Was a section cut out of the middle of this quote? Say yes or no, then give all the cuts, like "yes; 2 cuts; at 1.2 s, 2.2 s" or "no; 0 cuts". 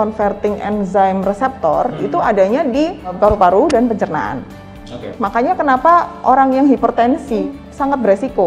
yes; 3 cuts; at 3.1 s, 5.1 s, 7.5 s